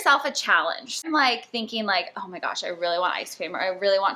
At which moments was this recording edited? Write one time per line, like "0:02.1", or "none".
0:01.0